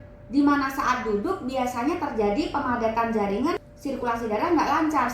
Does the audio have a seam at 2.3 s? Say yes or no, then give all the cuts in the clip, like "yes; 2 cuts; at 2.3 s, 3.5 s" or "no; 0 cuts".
no; 1 cut; at 3.6 s